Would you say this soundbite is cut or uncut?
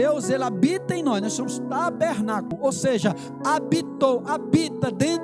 cut